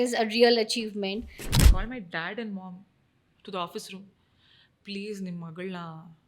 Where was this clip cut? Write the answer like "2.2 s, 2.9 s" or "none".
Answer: 1.5 s